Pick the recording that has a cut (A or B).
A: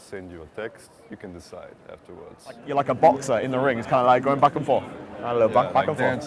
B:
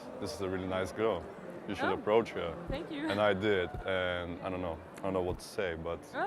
A